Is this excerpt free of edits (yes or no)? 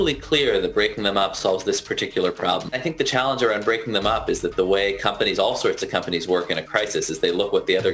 no